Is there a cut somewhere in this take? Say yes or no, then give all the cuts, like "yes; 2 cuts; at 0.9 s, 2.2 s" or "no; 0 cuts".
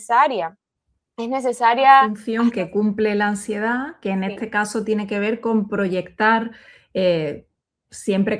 yes; 1 cut; at 2.2 s